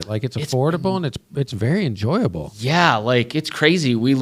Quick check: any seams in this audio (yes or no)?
no